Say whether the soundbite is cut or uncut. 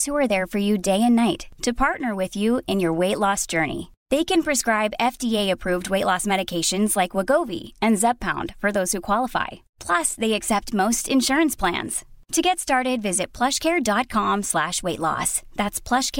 uncut